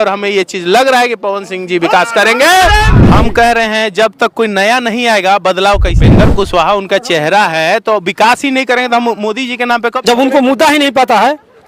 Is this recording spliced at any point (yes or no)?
yes